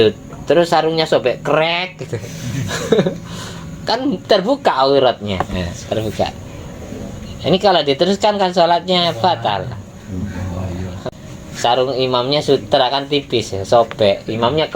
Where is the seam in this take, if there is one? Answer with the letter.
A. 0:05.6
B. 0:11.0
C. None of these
B